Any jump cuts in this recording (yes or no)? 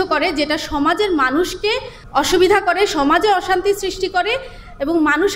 yes